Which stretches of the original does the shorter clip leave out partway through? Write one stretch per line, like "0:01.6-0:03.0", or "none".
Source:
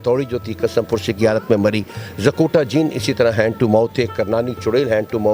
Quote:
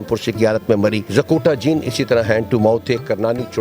0:01.8-0:02.1